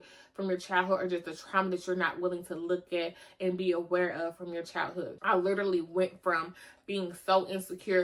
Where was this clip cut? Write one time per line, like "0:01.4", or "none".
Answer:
0:05.1

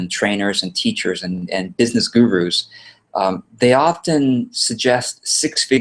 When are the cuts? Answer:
none

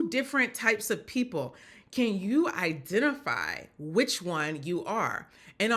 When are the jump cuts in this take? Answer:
0:01.6

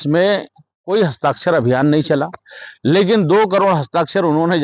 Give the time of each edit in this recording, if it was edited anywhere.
none

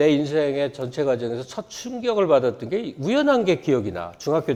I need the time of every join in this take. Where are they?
none

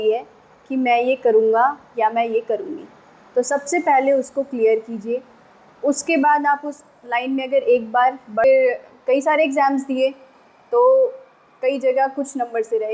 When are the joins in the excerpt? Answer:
0:08.4

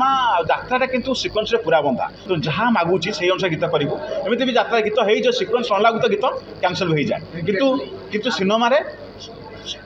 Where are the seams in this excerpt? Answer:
0:02.1

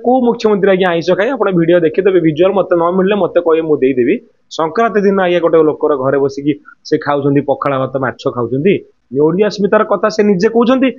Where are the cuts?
0:09.0

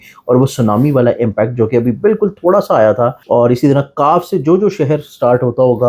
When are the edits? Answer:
0:03.2

